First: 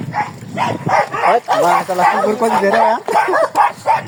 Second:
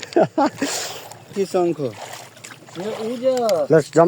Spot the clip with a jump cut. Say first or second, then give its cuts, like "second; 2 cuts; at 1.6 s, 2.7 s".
second; 1 cut; at 1.3 s